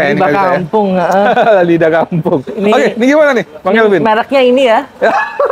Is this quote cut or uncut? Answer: uncut